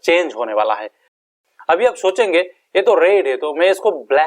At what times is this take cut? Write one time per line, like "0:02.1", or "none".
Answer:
0:01.2